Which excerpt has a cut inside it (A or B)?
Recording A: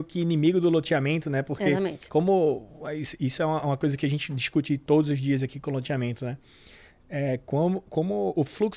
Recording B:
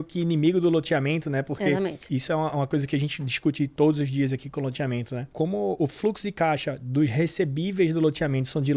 B